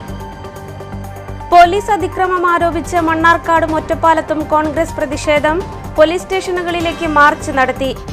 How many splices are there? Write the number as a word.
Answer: one